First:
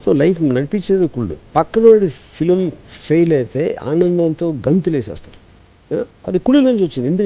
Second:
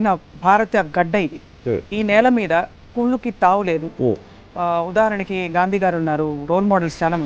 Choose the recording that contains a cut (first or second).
first